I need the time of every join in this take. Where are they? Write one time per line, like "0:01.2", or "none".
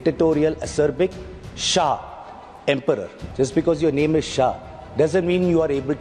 0:03.2